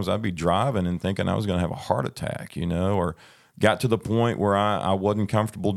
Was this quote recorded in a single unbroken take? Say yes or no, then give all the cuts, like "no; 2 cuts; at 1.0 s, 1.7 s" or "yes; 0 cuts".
yes; 0 cuts